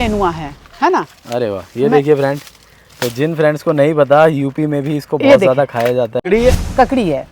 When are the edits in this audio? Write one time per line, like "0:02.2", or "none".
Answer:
0:06.2